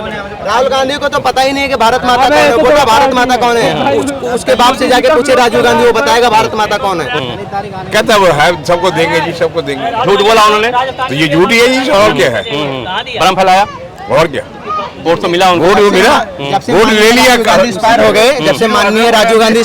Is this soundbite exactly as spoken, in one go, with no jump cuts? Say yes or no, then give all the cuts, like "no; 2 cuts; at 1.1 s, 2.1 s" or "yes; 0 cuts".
no; 1 cut; at 7.2 s